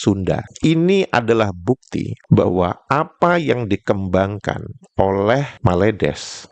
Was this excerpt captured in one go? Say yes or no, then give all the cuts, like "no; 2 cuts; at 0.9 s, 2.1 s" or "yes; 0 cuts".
yes; 0 cuts